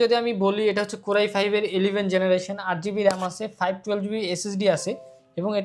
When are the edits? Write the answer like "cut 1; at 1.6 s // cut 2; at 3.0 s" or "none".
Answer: none